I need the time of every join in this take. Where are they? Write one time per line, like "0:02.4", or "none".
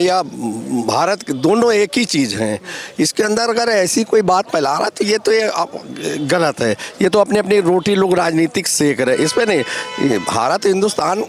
none